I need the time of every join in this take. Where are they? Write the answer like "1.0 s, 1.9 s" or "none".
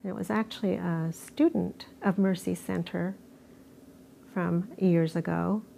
none